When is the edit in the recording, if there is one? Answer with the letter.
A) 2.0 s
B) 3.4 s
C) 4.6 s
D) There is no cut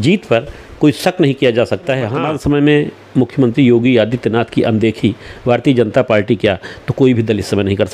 A